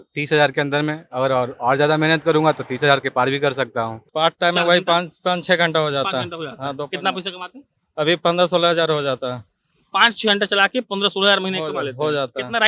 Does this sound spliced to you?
yes; 1 cut; at 4.0 s

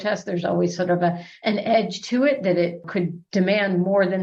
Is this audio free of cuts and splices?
yes; 0 cuts

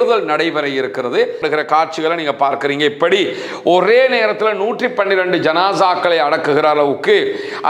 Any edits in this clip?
yes; 1 cut; at 1.4 s

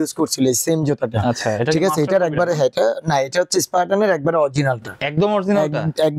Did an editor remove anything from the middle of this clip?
no; 0 cuts

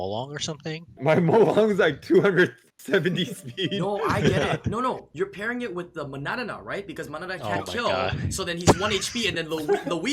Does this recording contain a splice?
yes; 2 cuts; at 0.9 s, 5.1 s

